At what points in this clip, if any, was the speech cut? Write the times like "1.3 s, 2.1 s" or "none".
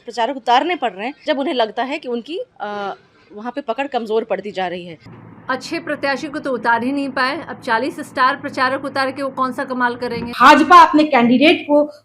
1.1 s, 5.0 s, 10.3 s